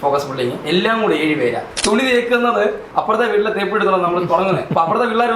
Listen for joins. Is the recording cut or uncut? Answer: cut